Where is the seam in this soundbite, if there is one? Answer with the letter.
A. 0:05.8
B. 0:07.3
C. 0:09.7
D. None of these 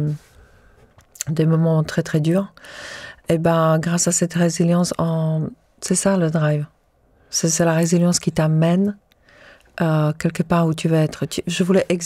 D